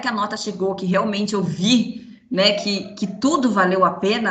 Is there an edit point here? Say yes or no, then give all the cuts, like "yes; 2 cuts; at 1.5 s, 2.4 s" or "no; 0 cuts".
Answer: no; 0 cuts